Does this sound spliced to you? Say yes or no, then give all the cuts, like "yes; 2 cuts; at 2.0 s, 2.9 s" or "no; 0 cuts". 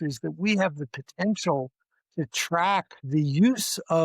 yes; 1 cut; at 3.0 s